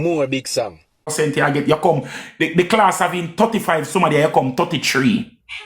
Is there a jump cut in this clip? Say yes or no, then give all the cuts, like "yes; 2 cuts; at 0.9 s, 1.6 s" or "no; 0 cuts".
yes; 1 cut; at 1.1 s